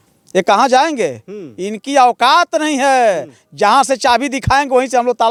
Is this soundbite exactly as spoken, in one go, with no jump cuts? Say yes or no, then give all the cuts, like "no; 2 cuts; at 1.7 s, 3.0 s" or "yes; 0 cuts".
yes; 0 cuts